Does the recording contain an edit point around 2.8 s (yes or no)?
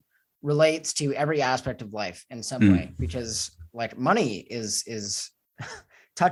no